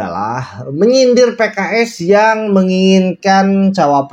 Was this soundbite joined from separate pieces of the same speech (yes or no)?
no